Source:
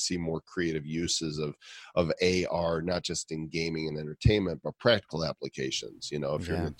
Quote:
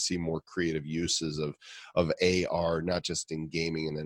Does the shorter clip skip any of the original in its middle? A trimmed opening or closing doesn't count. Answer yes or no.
no